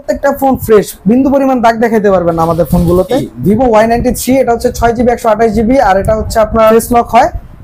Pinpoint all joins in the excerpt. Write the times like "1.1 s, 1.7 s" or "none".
3.3 s, 6.7 s